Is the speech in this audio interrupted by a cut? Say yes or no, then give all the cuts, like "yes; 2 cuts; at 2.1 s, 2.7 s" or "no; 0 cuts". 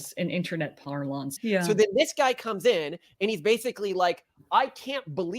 yes; 1 cut; at 1.3 s